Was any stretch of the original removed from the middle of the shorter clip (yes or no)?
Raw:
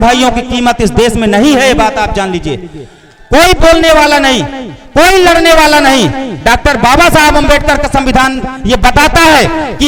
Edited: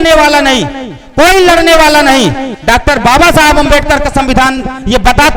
no